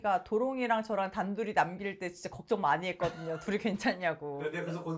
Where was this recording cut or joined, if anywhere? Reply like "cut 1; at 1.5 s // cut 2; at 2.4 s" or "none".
none